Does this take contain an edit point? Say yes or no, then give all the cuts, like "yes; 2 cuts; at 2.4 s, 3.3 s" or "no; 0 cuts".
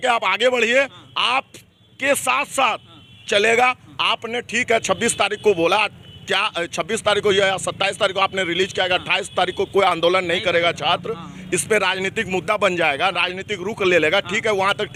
no; 0 cuts